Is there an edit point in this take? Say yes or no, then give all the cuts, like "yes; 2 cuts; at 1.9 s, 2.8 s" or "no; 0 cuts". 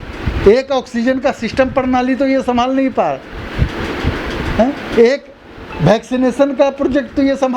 no; 0 cuts